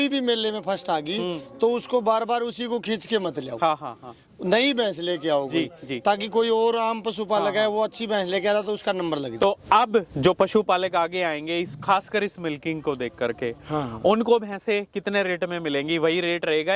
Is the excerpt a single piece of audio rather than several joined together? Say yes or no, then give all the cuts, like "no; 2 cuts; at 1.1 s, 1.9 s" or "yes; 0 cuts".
no; 1 cut; at 9.4 s